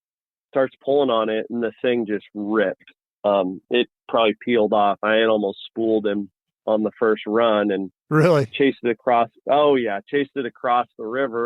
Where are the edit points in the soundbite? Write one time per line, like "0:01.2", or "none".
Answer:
none